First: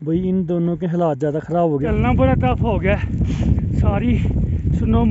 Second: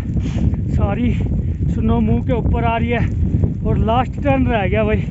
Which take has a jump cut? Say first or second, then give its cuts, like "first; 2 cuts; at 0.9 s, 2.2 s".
first; 1 cut; at 1.9 s